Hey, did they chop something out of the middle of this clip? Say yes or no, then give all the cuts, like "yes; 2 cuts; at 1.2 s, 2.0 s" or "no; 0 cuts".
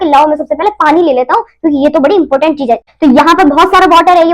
yes; 1 cut; at 2.9 s